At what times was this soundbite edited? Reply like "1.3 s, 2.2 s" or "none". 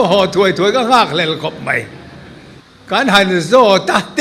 3.0 s